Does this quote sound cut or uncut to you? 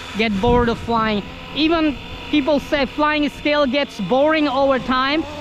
uncut